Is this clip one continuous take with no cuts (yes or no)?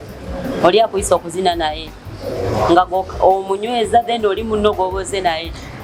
yes